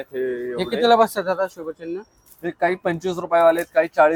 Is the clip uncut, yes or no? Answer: yes